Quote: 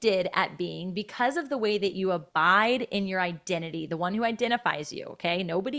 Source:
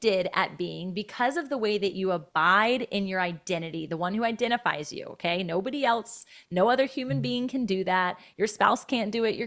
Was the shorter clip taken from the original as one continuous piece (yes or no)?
yes